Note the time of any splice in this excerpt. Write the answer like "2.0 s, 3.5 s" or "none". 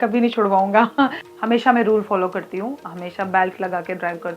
1.2 s